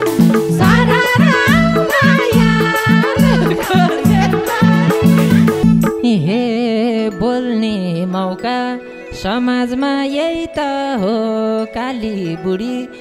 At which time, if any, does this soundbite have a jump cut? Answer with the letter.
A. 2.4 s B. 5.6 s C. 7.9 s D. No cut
B